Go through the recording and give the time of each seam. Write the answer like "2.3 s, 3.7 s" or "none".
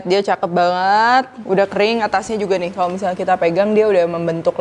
none